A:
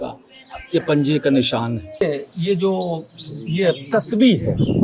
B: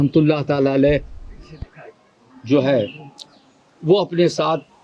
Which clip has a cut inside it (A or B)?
A